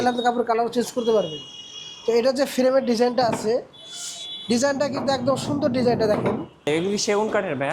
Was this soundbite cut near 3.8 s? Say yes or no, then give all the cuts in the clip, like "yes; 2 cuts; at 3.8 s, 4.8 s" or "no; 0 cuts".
no; 1 cut; at 6.7 s